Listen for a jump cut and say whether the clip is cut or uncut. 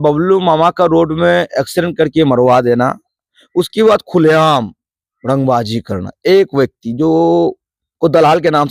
uncut